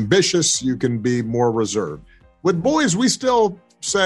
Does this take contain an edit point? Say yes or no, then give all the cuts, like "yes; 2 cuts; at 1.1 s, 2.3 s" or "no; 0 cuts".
yes; 1 cut; at 2.0 s